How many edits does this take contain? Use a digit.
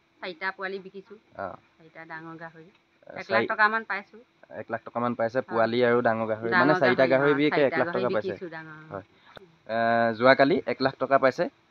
1